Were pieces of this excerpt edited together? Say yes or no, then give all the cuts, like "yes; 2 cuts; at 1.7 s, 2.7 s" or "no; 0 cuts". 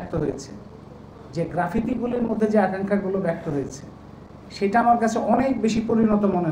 no; 0 cuts